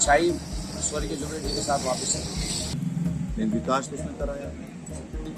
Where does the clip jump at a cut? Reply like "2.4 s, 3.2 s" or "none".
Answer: 2.7 s